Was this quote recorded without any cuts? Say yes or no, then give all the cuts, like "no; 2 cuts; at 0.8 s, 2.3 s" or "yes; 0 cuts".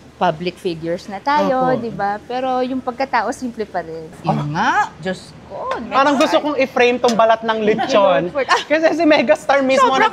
no; 2 cuts; at 4.2 s, 5.8 s